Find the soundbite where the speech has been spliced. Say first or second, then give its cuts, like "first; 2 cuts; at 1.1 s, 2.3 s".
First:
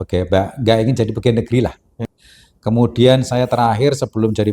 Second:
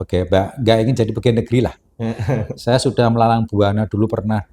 first; 1 cut; at 2.1 s